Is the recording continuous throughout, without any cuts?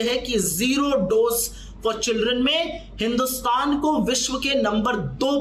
yes; 0 cuts

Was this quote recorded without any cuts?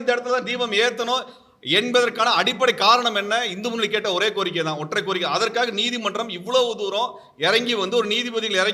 yes; 0 cuts

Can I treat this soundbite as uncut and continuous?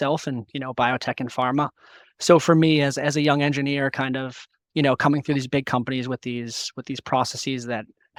yes; 0 cuts

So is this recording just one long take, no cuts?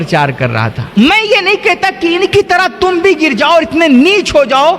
no; 1 cut; at 0.9 s

